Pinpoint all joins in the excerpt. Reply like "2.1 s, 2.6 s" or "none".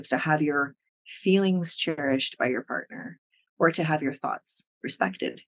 none